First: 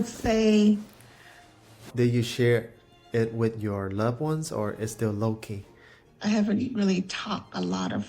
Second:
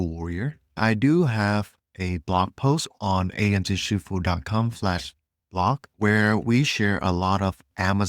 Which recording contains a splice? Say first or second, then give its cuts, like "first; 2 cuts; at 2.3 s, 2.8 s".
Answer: first; 2 cuts; at 1.8 s, 6.0 s